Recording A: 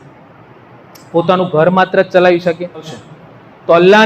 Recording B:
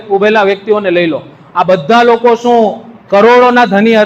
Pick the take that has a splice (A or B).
A